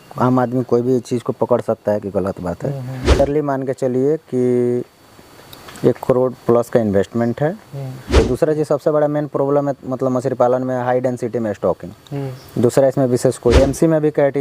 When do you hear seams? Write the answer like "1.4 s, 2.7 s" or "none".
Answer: 3.2 s, 8.2 s, 13.6 s